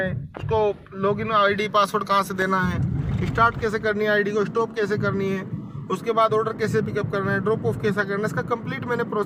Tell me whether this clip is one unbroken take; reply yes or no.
yes